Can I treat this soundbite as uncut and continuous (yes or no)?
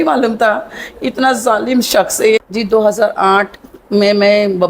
no